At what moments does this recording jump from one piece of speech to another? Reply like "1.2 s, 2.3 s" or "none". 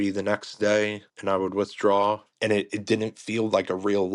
1.1 s, 2.3 s